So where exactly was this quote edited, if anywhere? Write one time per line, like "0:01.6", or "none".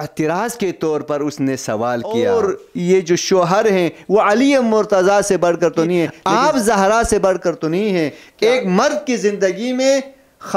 0:02.2
0:06.2
0:08.2